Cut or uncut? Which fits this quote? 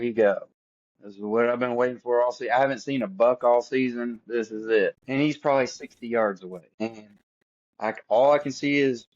cut